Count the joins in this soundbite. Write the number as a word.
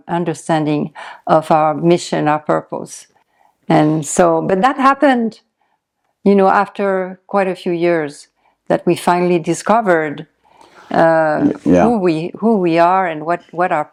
zero